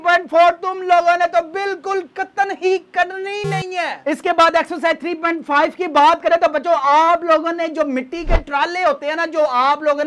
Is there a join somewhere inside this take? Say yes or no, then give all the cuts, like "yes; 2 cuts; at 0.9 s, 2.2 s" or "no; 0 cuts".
no; 0 cuts